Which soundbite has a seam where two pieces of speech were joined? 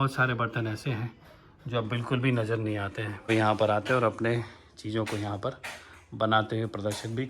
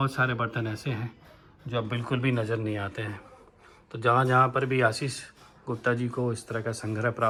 first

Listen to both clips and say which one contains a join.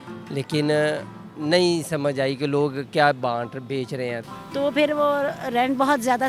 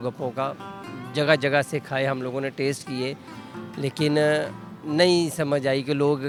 first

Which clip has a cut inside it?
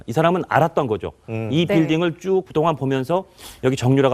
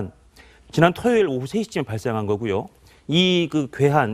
first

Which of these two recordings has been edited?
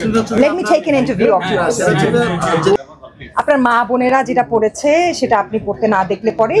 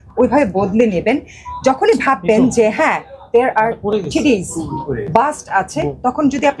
first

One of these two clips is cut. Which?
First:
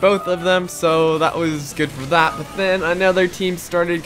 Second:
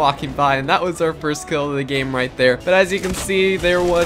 second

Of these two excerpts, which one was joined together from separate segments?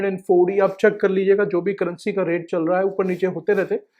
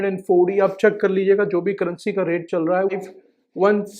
second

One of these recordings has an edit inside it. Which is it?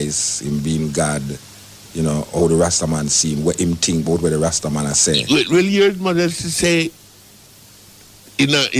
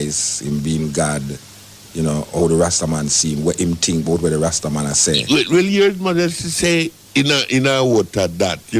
second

